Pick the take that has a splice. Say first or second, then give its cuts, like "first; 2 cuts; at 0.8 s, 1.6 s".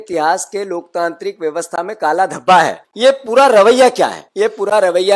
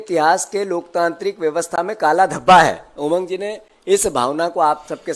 first; 2 cuts; at 2.8 s, 4.2 s